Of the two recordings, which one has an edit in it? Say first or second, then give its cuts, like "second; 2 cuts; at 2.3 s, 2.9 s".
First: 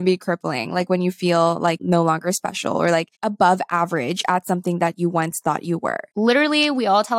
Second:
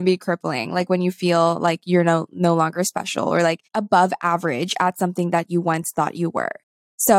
first; 2 cuts; at 1.8 s, 6.1 s